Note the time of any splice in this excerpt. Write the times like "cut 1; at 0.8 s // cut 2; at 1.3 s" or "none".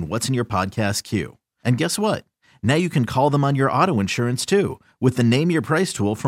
none